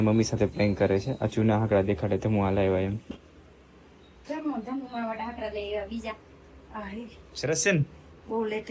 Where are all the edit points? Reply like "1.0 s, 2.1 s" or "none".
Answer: 3.0 s